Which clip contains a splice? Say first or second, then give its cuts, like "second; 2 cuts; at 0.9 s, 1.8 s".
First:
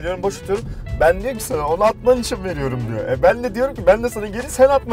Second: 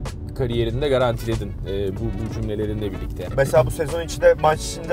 second; 1 cut; at 3.2 s